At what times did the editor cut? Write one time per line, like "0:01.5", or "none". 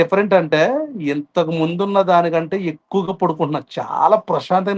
none